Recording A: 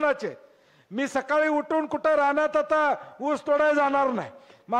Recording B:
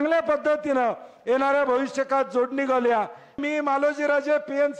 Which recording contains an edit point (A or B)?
B